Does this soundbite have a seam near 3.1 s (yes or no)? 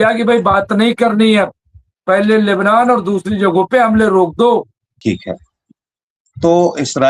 no